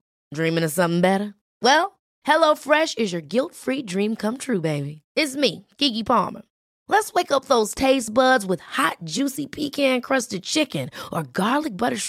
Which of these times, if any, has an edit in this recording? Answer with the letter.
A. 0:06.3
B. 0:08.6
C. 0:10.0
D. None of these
D